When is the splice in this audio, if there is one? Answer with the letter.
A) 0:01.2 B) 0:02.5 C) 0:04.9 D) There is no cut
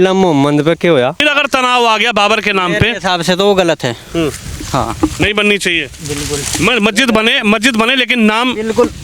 A